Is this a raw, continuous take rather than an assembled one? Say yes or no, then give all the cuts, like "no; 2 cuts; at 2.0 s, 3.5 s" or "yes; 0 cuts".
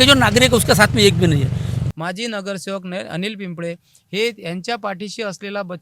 no; 1 cut; at 1.8 s